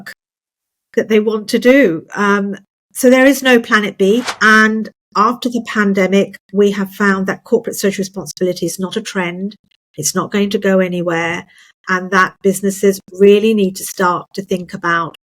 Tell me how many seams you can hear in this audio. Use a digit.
1